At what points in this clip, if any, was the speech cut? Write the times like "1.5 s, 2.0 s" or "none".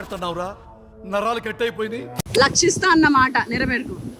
2.2 s